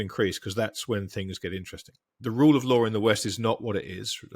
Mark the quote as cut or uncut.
cut